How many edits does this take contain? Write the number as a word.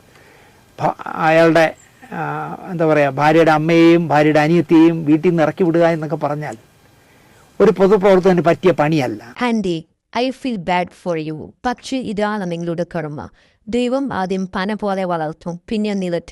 one